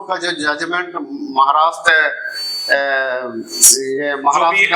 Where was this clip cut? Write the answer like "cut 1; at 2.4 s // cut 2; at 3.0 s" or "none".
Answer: none